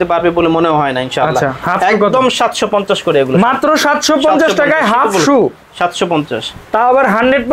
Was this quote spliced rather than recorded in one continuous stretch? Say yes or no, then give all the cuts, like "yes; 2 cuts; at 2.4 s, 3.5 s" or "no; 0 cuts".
no; 0 cuts